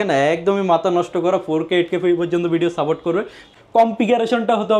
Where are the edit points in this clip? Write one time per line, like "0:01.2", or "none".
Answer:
0:03.5